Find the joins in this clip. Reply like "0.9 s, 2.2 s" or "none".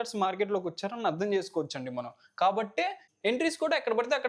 3.1 s